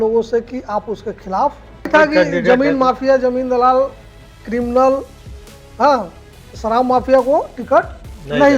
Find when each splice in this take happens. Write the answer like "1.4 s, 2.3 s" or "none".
1.9 s

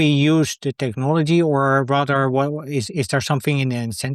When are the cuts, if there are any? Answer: none

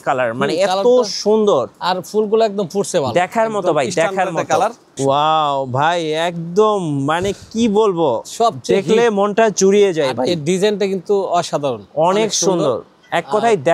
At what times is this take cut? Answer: 4.9 s

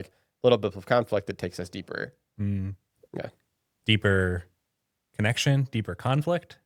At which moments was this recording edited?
none

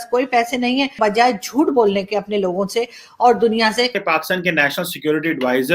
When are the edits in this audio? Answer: 1.0 s, 4.0 s

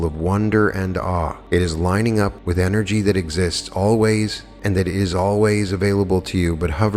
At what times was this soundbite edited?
1.4 s, 2.4 s, 4.5 s

